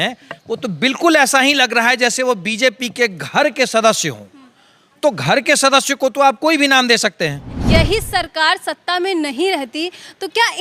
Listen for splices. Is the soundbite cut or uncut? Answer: cut